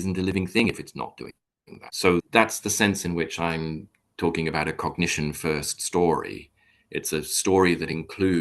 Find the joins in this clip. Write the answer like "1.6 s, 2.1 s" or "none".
1.9 s